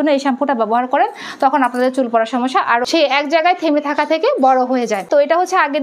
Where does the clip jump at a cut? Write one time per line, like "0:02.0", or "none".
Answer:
0:02.8
0:05.0